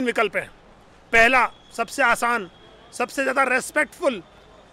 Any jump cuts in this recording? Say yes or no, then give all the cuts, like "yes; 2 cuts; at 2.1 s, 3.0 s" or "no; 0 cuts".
no; 0 cuts